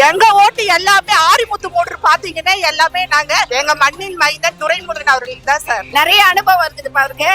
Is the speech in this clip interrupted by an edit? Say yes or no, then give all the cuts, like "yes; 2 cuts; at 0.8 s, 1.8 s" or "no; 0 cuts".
yes; 2 cuts; at 3.5 s, 5.9 s